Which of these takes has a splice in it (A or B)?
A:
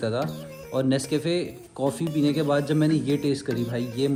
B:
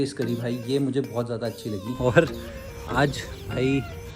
B